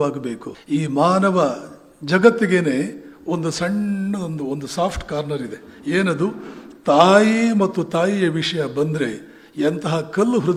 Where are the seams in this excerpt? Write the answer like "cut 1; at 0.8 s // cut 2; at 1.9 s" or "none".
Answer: none